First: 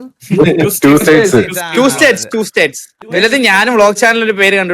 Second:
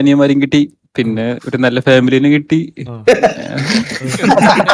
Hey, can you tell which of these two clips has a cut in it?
first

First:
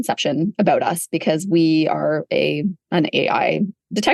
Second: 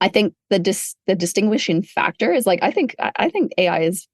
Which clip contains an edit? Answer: second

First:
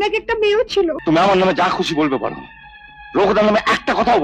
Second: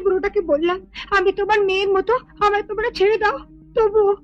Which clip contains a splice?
first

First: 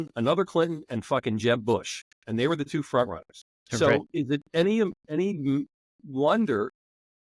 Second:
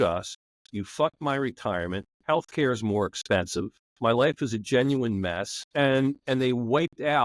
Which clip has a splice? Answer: second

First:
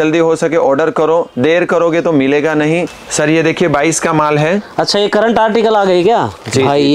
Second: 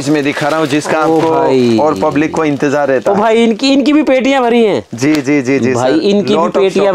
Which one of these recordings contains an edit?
first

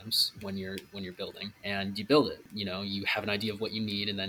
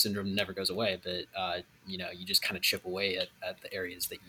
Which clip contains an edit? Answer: first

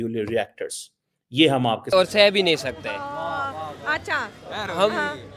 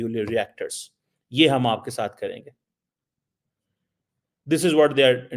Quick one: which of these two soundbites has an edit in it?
first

